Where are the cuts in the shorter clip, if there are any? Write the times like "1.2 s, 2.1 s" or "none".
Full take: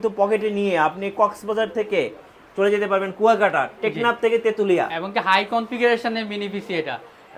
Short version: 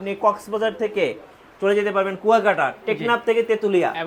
none